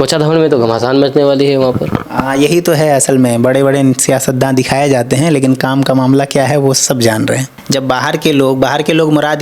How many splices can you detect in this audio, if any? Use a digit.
1